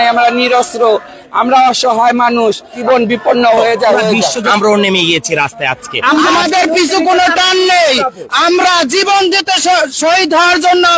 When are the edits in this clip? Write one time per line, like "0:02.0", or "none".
0:02.8
0:04.4
0:06.4